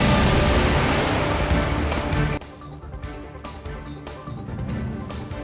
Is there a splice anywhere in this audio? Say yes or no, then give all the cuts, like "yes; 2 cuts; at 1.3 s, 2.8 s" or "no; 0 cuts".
no; 0 cuts